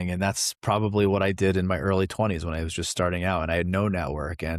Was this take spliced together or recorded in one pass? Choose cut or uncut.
uncut